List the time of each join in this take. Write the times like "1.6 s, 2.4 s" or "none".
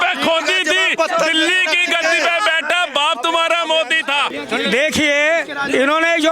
4.3 s

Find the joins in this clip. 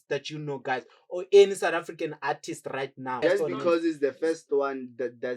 3.2 s

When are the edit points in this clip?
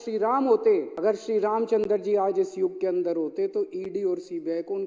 0.9 s

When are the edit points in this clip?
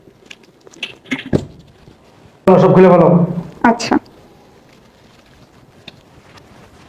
2.5 s

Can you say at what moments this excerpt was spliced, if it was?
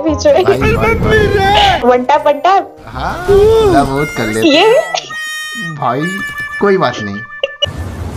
none

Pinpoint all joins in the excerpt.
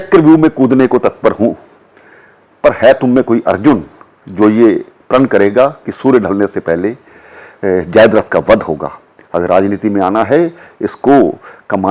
none

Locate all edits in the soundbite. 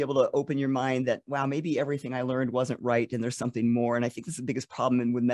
none

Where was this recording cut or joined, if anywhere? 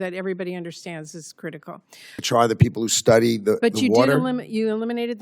2.2 s

